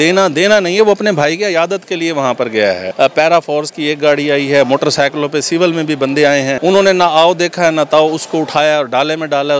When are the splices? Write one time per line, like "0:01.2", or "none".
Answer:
0:02.9
0:06.6